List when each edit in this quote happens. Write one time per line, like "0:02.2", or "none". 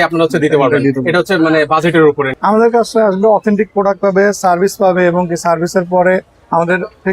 0:02.3